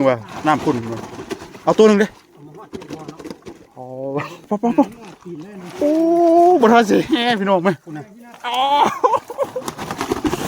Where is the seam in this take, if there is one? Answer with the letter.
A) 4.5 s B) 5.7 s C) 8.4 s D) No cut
A